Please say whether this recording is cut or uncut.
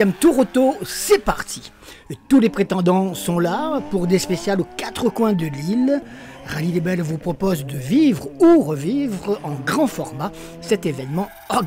uncut